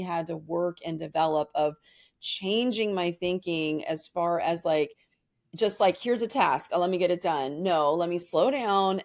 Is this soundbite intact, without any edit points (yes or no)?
yes